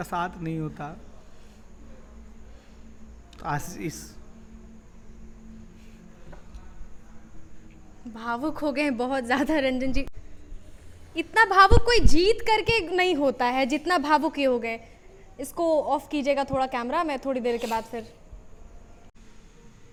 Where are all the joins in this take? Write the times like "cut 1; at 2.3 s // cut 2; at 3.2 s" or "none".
none